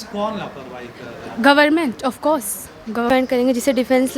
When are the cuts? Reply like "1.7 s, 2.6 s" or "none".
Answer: 3.1 s